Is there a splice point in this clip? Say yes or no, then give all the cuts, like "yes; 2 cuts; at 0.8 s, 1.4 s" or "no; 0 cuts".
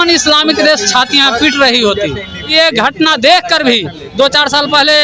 yes; 1 cut; at 2.5 s